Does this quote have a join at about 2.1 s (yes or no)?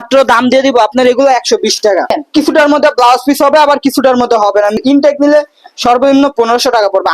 yes